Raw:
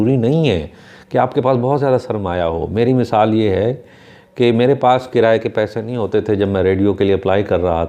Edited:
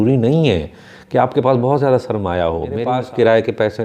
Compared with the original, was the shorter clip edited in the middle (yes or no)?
yes